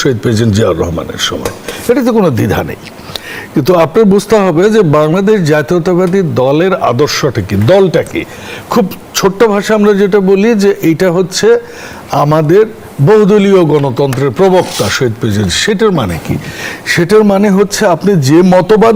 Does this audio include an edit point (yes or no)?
no